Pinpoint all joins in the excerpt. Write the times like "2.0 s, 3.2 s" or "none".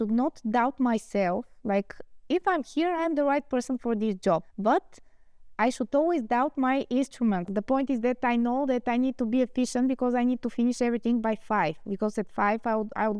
4.5 s, 7.5 s

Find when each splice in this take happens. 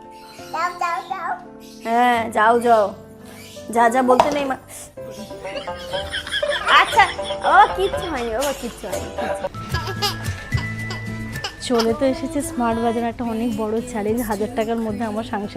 9.5 s

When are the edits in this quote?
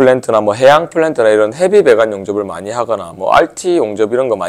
none

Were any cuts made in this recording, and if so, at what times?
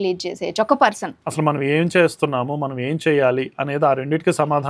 1.2 s

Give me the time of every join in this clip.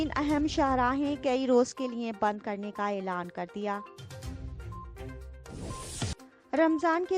3.8 s, 5.6 s

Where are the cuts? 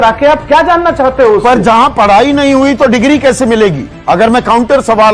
none

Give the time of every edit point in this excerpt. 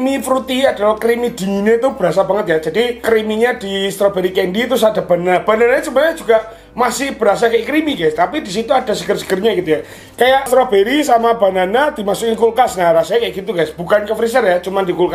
none

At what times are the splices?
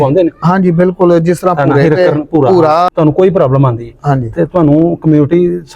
2.9 s

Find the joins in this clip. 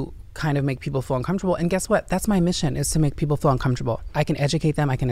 4.1 s

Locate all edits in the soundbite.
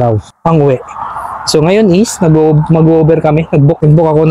none

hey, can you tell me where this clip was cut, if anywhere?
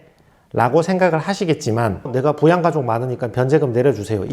2.0 s

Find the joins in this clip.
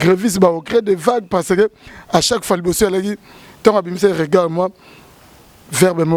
none

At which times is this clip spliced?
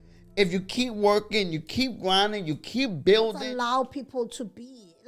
3.4 s

